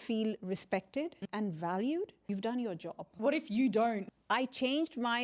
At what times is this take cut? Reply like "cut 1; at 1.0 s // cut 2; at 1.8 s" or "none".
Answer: cut 1; at 1.2 s // cut 2; at 2.3 s // cut 3; at 3.1 s // cut 4; at 4.1 s